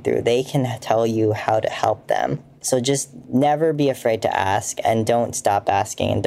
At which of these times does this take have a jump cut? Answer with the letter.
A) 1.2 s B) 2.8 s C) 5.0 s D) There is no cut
B